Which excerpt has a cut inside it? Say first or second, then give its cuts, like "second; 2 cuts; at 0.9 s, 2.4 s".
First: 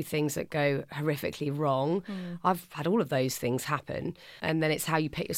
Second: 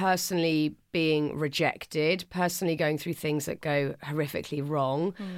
first; 1 cut; at 4.4 s